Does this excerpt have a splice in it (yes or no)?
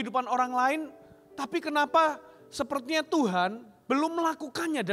no